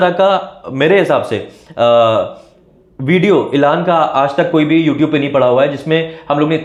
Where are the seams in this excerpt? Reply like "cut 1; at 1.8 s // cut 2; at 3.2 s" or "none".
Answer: none